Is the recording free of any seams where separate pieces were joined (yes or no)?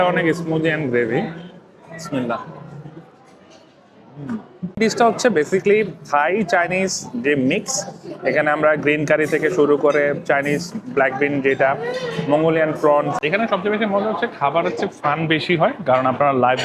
no